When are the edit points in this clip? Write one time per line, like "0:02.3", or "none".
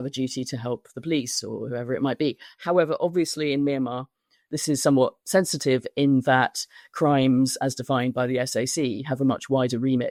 none